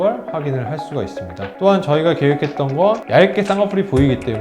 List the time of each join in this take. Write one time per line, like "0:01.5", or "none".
0:03.0